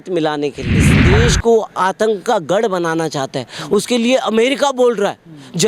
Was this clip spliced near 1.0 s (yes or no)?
yes